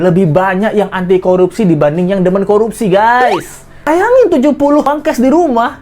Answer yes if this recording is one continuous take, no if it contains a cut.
no